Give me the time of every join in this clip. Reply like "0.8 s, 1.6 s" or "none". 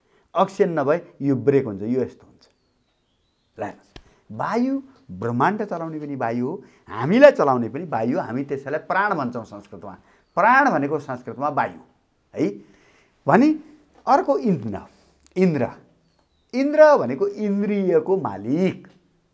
none